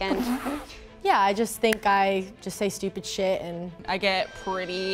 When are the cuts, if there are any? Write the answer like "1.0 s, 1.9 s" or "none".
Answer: 1.0 s, 3.8 s